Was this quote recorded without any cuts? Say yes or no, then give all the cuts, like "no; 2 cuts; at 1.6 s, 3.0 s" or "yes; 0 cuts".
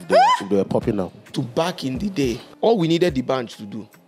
no; 2 cuts; at 1.3 s, 2.5 s